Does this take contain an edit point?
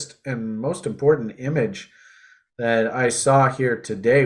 no; 0 cuts

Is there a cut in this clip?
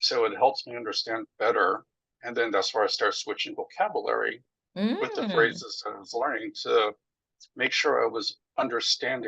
no; 0 cuts

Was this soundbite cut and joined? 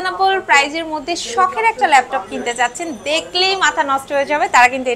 no; 0 cuts

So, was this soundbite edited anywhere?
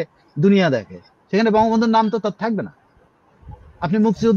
no; 0 cuts

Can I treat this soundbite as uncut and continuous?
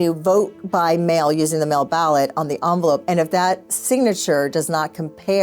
no; 1 cut; at 3.0 s

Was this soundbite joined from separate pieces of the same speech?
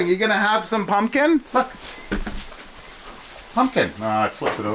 yes; 1 cut; at 1.5 s

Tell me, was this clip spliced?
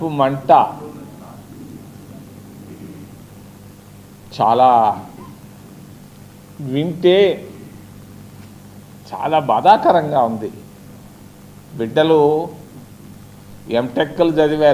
no; 0 cuts

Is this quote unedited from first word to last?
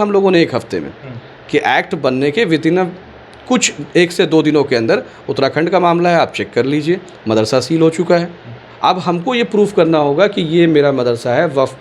yes; 0 cuts

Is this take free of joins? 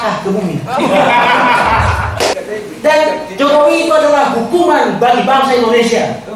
no; 1 cut; at 2.4 s

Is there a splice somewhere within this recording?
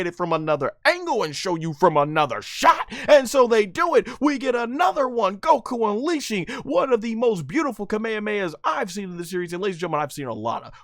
no; 0 cuts

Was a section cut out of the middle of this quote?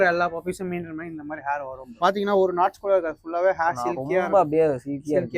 yes; 1 cut; at 2.0 s

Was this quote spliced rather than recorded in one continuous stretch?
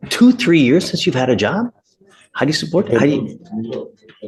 no; 0 cuts

